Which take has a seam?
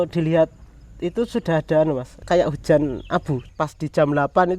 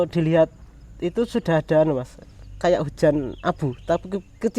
first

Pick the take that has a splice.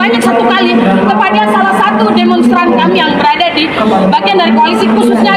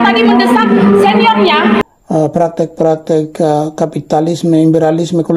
second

